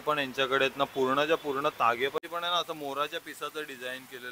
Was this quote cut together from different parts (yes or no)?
yes